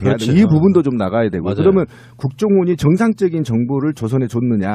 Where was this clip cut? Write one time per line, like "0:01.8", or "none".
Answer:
0:03.7